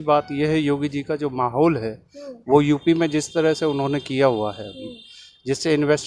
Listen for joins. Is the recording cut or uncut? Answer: uncut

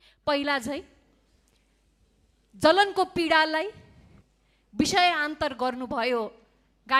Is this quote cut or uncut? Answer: uncut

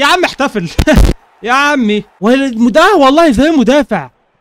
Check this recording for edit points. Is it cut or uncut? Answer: cut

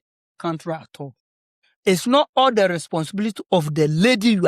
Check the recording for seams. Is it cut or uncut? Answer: uncut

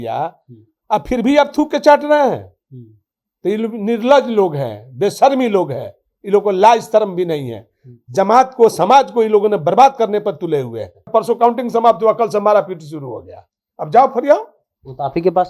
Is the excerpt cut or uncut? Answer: cut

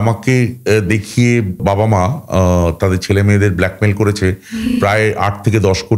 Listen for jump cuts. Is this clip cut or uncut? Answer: cut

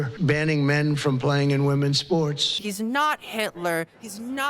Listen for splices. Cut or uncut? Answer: cut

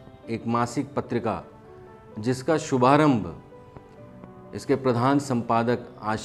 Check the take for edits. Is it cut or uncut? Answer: uncut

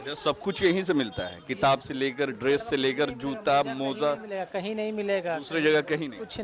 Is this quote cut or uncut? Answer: uncut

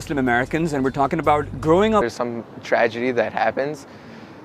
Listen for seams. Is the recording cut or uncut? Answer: uncut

